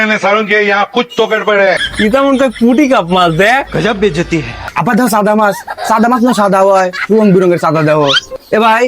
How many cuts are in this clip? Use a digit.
2